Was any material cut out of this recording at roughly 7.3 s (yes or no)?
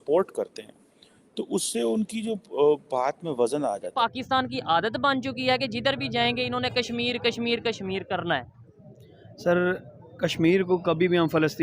no